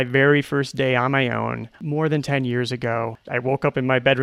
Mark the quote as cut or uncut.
cut